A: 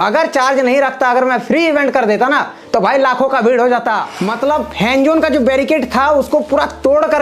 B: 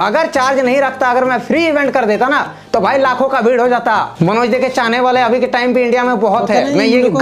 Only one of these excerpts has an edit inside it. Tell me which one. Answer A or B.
A